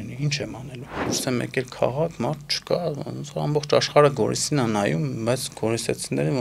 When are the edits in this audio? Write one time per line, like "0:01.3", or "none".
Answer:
0:01.1

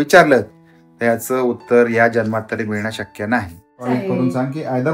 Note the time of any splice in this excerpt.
0:03.8

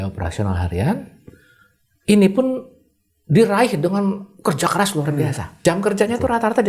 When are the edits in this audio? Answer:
0:05.6

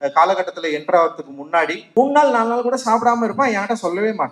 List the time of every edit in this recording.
0:01.8

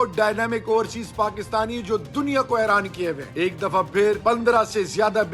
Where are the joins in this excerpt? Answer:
0:03.3
0:04.2

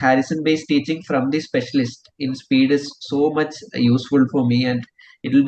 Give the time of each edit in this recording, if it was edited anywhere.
none

